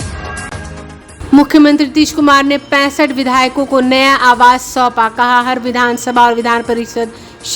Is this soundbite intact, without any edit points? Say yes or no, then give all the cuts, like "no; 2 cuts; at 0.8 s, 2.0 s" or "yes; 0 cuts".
yes; 0 cuts